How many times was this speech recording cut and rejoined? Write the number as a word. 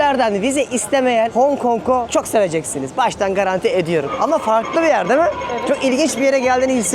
three